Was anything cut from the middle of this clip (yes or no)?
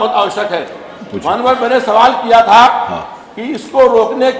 no